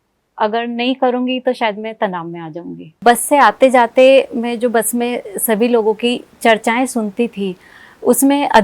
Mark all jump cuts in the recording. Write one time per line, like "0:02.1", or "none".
0:03.0